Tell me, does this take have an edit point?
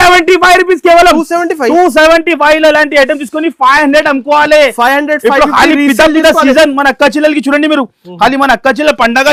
no; 0 cuts

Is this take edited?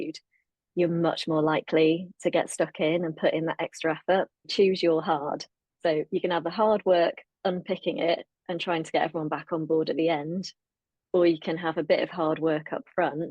yes; 1 cut; at 4.5 s

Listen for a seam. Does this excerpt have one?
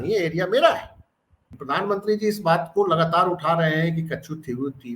yes; 1 cut; at 1.5 s

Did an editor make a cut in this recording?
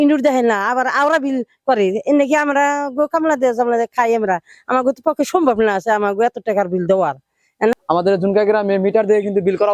yes; 1 cut; at 7.8 s

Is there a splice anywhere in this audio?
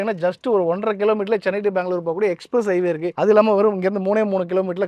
yes; 1 cut; at 3.1 s

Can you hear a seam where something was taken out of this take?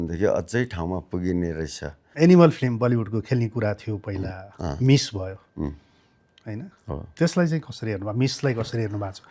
yes; 1 cut; at 2.0 s

